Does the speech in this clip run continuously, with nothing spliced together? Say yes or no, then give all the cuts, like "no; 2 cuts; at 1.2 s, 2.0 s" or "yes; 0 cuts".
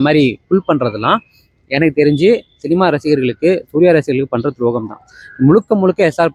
yes; 0 cuts